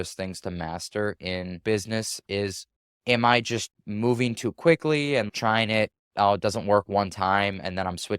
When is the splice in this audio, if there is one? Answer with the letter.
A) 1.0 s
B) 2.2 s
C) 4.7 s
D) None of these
B